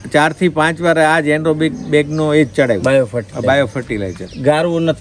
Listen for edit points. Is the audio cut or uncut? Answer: uncut